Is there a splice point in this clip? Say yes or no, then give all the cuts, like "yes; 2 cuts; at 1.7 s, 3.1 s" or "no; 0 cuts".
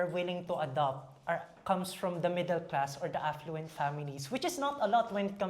no; 0 cuts